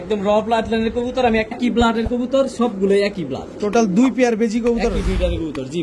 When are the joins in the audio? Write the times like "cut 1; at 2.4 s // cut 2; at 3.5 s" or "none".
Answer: cut 1; at 1.6 s

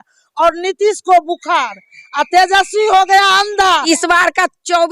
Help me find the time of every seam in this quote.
cut 1; at 3.8 s

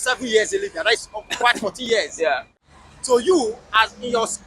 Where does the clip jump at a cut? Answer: cut 1; at 2.5 s

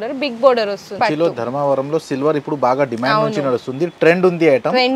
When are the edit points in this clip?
cut 1; at 1.0 s

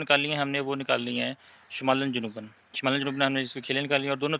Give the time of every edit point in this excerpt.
none

